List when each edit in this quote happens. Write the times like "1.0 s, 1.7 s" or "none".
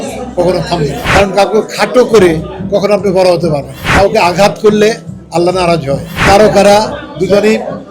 1.0 s, 3.8 s, 6.1 s